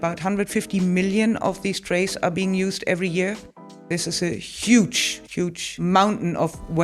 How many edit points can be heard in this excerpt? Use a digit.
2